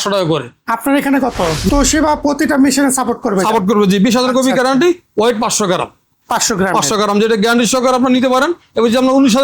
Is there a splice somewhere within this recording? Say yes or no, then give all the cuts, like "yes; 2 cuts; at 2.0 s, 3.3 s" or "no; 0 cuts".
yes; 1 cut; at 1.7 s